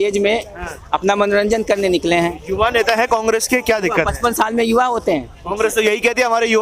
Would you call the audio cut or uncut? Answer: uncut